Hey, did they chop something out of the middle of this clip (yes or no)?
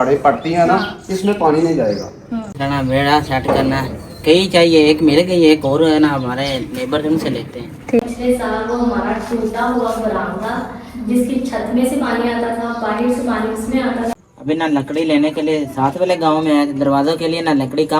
yes